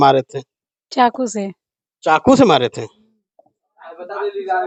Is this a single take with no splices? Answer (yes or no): yes